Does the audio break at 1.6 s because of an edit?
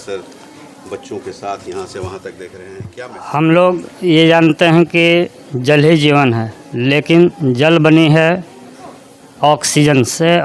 no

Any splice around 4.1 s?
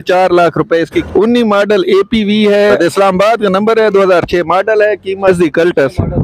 no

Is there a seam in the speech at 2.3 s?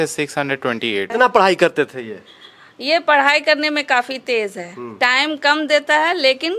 no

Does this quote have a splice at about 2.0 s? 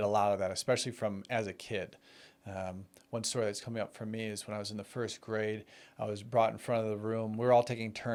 no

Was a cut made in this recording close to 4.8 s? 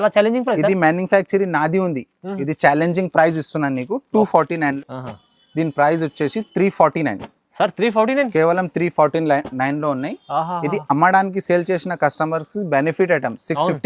yes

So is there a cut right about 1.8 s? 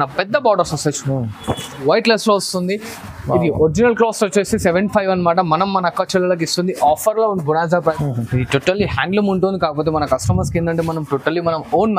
yes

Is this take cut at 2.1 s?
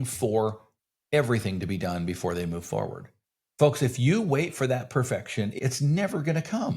no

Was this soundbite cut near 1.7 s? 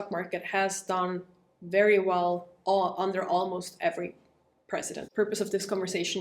no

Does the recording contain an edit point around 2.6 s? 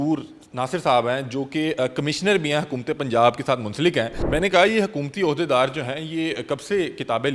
no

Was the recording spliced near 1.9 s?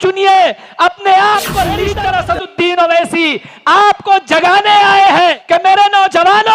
yes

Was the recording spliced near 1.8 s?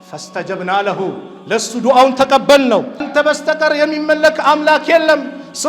no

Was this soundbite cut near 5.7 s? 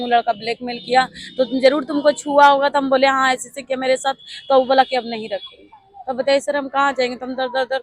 no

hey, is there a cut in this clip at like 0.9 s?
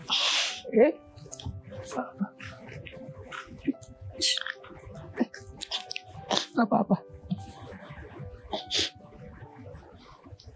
no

